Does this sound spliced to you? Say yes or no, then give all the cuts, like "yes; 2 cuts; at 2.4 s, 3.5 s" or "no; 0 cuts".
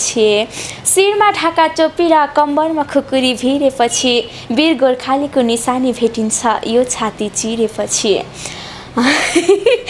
no; 0 cuts